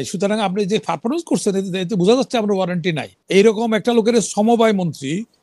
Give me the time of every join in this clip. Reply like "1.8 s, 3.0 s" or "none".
3.1 s